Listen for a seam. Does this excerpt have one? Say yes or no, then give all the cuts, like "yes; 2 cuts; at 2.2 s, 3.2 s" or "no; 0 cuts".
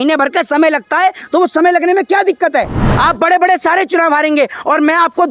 yes; 1 cut; at 2.8 s